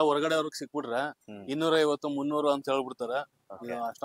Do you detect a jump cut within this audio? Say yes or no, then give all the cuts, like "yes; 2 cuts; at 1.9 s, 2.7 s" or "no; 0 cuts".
no; 0 cuts